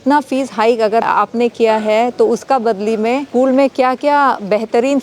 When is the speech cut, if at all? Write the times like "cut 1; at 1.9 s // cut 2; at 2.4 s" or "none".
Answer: cut 1; at 3.3 s